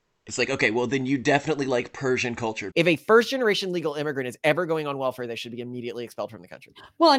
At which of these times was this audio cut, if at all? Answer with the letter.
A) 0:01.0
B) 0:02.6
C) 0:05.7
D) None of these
B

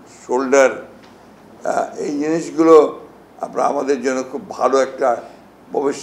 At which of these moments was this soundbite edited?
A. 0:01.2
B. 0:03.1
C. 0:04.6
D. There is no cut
D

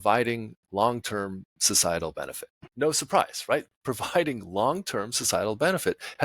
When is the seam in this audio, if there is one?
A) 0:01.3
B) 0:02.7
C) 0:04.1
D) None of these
B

